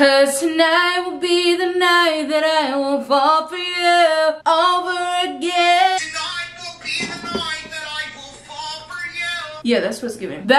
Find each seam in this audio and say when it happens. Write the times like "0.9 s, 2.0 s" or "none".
none

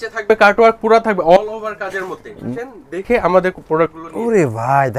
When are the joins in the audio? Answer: 2.4 s

